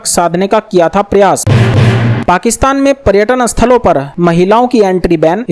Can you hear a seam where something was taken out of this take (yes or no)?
yes